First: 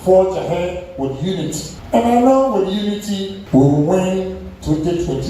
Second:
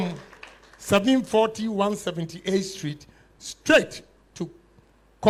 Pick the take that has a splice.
first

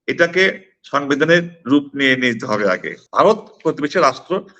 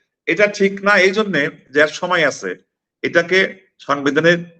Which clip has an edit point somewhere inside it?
first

